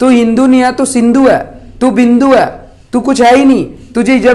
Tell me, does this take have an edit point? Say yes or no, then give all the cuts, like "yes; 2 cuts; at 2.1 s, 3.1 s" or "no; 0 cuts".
no; 0 cuts